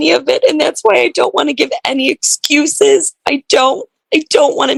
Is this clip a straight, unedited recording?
yes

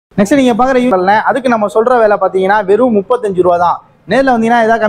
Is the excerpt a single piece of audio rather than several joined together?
no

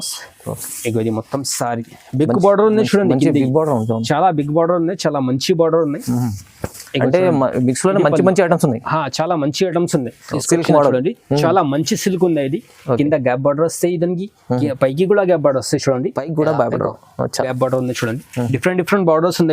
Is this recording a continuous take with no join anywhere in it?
no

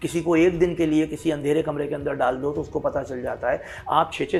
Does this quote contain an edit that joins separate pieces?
no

